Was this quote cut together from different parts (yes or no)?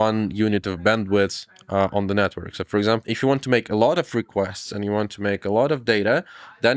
no